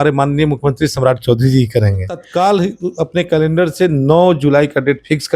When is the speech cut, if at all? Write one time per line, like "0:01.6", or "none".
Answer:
0:02.3